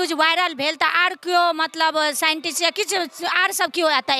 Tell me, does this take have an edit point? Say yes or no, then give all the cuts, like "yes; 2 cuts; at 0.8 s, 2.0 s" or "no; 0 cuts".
no; 0 cuts